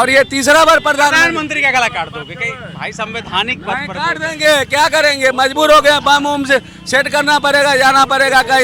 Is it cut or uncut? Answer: uncut